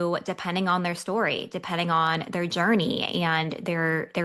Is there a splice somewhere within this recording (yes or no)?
no